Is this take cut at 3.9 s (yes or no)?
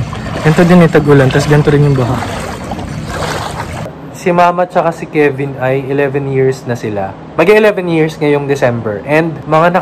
yes